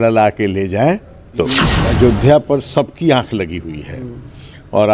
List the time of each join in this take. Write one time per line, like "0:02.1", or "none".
0:01.7